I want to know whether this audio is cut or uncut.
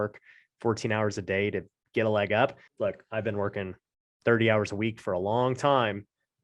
cut